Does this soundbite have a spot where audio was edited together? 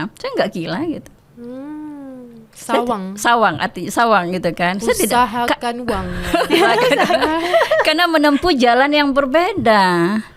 no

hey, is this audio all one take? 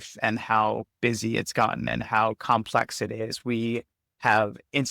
no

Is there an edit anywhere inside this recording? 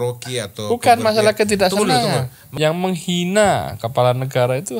yes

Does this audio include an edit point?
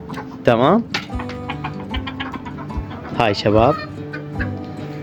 no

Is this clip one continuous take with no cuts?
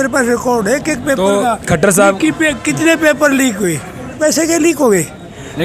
no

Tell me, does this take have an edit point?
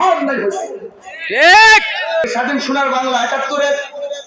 yes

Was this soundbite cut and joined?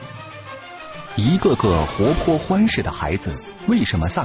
yes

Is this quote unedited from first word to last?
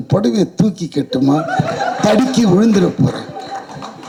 yes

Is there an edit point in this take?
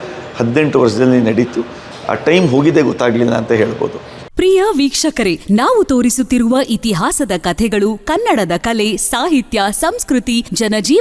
no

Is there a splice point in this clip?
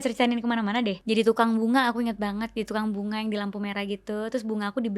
yes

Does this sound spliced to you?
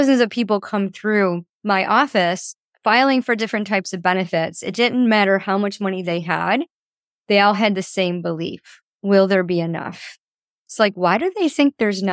yes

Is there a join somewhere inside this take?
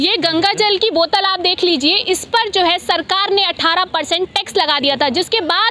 no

